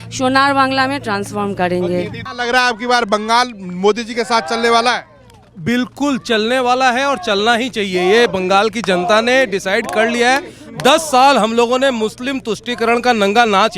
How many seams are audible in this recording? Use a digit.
1